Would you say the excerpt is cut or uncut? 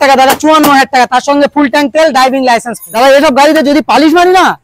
cut